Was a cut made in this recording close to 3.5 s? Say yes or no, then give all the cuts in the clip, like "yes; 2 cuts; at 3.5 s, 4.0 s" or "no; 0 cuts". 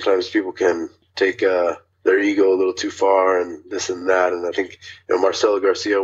no; 2 cuts; at 1.0 s, 1.9 s